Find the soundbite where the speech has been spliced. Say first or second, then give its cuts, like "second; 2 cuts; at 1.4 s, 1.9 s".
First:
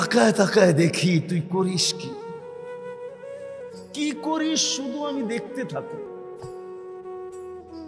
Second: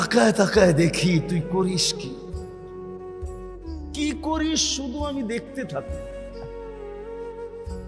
first; 2 cuts; at 1.8 s, 3.5 s